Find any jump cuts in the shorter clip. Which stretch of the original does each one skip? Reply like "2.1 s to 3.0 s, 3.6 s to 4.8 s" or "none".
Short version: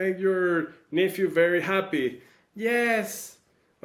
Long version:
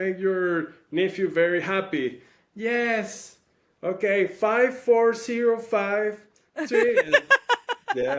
none

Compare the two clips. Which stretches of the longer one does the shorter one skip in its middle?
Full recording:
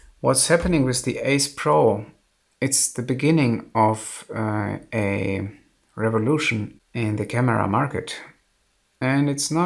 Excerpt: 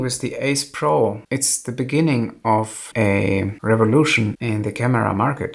2.1 s to 2.5 s, 4.4 s to 5.4 s, 6.7 s to 6.9 s

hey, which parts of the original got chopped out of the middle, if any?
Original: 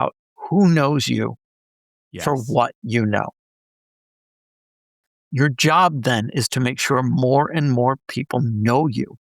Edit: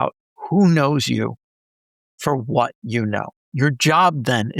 3.4 s to 5.2 s

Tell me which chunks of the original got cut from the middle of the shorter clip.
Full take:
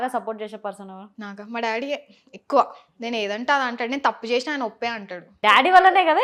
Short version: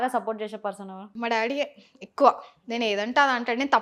1.0 s to 1.4 s

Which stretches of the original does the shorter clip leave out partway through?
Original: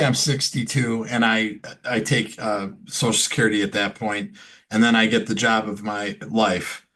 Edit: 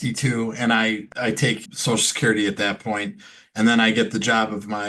1.9 s to 2.6 s

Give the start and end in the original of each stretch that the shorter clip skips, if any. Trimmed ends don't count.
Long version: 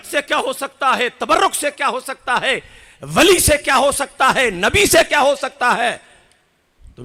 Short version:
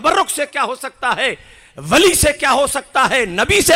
none

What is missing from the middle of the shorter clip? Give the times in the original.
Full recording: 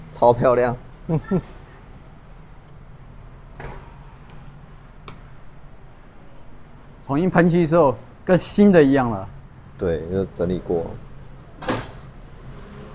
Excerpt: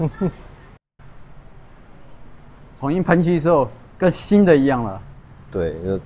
2.0 s to 5.2 s

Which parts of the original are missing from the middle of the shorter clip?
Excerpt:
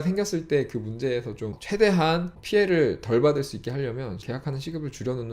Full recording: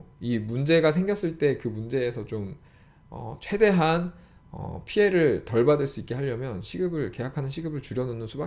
2.4 s to 3.3 s, 4.1 s to 4.8 s, 6.7 s to 7.1 s

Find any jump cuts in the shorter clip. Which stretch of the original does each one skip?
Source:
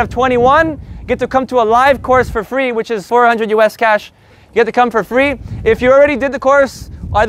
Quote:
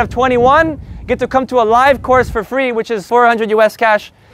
none

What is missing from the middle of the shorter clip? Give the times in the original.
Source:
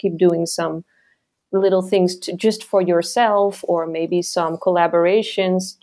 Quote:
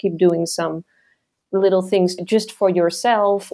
2.2 s to 2.3 s

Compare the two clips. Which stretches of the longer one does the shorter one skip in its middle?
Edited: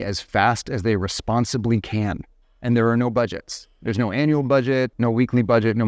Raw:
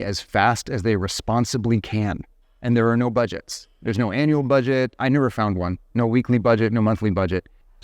4.9 s to 5.9 s

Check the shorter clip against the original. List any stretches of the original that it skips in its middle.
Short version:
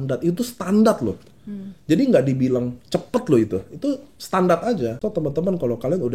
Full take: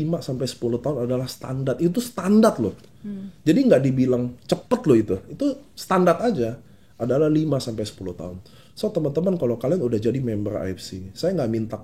6.5 s to 8.8 s

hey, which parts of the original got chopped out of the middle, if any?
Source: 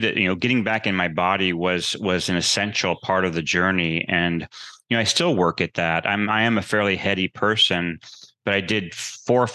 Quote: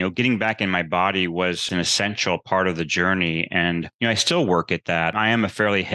1.9 s to 2.2 s, 4.5 s to 4.8 s, 6.0 s to 6.3 s

